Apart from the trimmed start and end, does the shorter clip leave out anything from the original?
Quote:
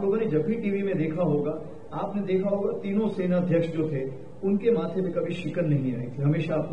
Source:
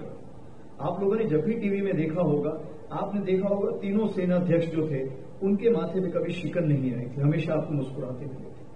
no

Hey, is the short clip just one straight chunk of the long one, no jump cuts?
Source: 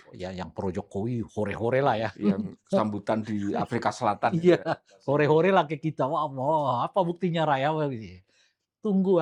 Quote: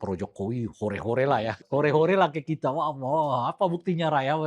no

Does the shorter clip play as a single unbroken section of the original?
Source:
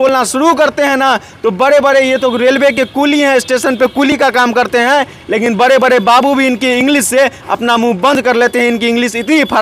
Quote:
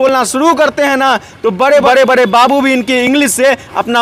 no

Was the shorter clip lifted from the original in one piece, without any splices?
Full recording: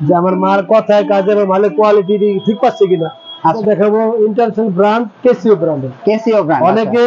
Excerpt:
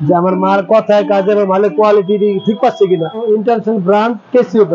no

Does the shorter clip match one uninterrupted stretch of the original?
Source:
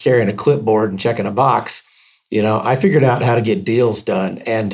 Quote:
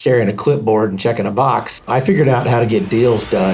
no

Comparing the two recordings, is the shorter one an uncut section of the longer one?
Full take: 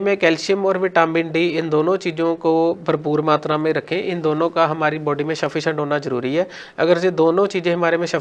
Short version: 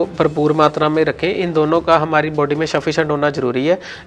yes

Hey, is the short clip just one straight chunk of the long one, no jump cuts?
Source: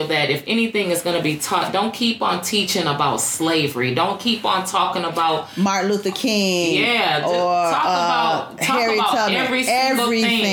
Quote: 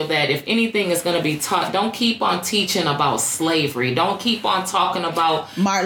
yes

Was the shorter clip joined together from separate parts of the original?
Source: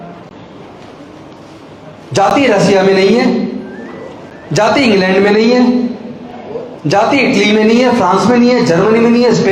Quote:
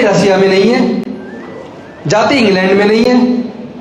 no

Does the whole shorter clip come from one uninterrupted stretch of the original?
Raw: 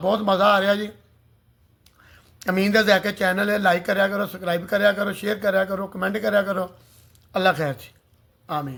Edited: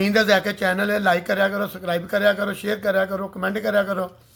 yes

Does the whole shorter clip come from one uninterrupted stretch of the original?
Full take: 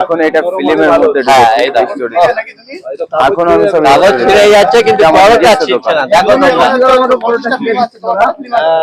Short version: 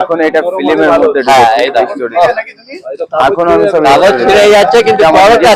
yes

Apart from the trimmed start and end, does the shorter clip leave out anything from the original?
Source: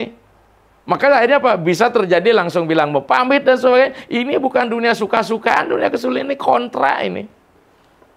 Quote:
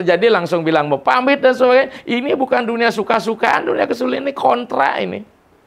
no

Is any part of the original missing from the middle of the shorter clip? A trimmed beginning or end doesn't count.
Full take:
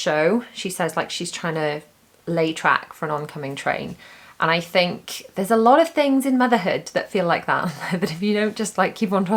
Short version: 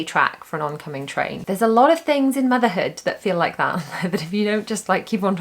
yes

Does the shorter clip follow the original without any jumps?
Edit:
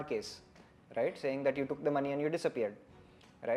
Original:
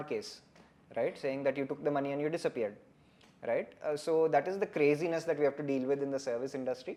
yes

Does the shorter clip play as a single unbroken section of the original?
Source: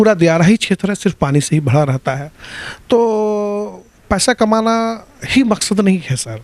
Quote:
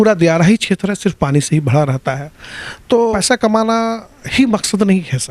no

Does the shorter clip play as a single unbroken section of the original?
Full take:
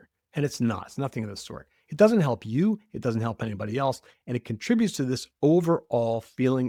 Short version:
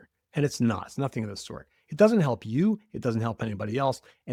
yes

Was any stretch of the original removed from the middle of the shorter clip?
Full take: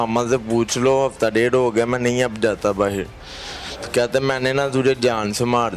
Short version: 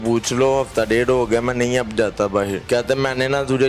yes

